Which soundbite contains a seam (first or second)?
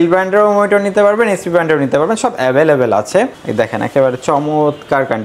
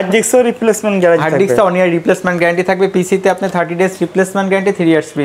first